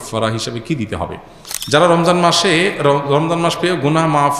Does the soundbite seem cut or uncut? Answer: cut